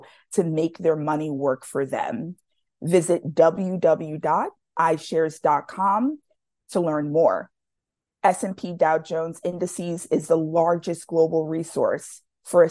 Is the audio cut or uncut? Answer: uncut